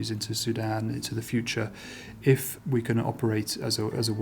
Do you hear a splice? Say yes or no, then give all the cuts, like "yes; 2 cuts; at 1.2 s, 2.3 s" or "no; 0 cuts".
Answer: no; 0 cuts